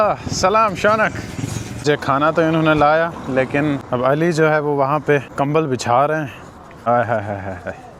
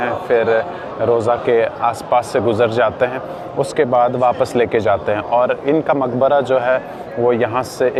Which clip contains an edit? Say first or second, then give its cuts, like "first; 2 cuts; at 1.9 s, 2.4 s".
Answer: first; 4 cuts; at 1.7 s, 3.8 s, 5.3 s, 6.9 s